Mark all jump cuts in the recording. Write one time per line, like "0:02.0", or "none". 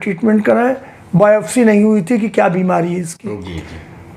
none